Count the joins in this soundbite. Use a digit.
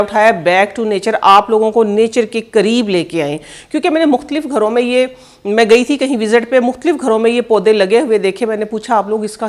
0